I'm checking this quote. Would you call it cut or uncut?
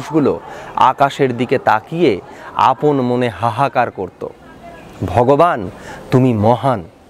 uncut